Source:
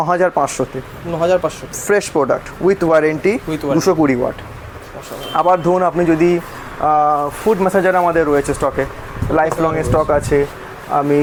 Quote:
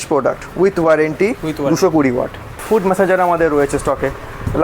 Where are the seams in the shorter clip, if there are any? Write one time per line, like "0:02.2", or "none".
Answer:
0:02.6